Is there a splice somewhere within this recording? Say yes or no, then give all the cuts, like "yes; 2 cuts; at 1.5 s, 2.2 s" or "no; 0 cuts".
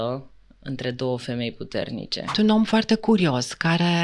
yes; 1 cut; at 2.4 s